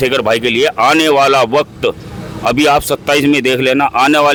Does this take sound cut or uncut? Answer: uncut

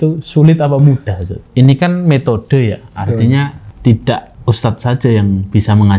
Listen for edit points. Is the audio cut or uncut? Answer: cut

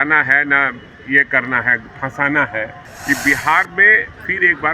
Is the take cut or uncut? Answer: cut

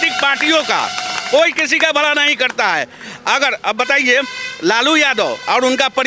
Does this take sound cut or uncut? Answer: uncut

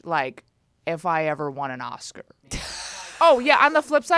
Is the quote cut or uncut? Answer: cut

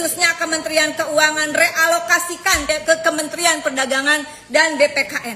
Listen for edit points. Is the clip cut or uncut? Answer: cut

